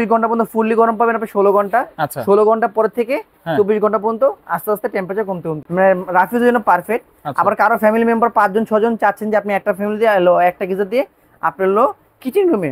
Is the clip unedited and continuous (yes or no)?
no